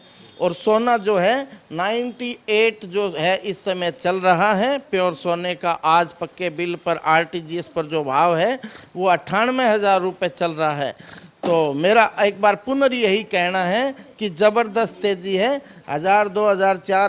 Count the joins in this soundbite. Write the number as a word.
zero